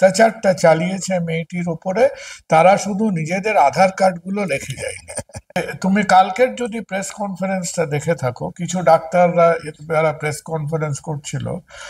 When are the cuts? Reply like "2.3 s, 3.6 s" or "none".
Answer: 5.6 s